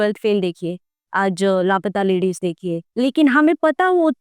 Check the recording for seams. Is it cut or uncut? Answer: uncut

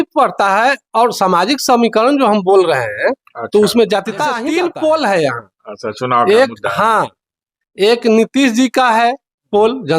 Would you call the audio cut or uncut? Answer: cut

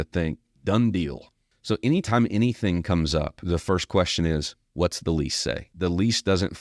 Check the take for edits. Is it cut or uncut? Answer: cut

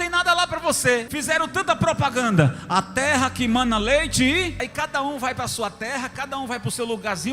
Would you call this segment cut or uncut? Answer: cut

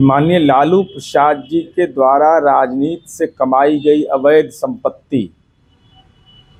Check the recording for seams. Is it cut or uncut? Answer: uncut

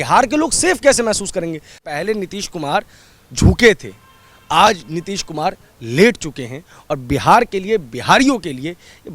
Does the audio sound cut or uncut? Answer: cut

